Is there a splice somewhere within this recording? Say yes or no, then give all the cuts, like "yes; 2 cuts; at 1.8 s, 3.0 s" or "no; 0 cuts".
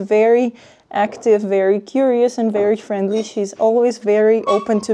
no; 0 cuts